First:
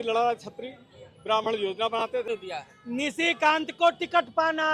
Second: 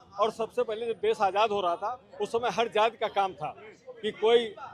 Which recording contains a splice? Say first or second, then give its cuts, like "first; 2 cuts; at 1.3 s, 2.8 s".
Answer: first; 1 cut; at 2.2 s